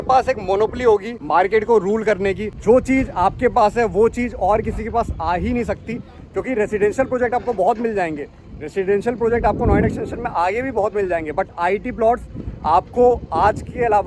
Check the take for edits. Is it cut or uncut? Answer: cut